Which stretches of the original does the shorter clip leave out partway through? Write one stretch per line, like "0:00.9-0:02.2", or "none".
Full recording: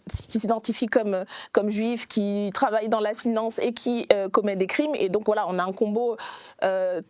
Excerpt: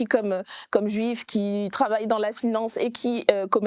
none